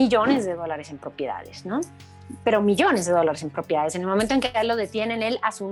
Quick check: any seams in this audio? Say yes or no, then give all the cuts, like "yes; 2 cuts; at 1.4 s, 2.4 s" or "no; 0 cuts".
no; 0 cuts